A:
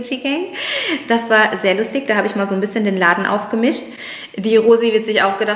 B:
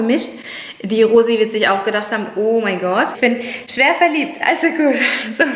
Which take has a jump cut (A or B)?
B